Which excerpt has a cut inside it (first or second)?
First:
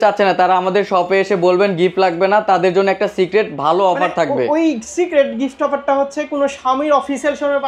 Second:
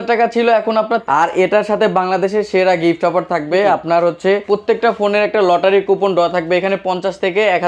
second